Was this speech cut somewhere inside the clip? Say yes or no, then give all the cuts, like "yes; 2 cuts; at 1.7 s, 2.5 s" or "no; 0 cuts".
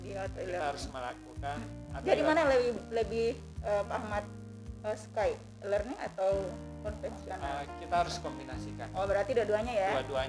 no; 0 cuts